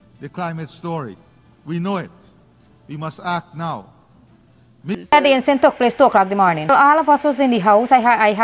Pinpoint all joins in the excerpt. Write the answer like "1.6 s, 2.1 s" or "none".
4.9 s